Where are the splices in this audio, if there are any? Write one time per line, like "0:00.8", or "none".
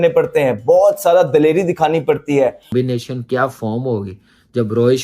0:02.8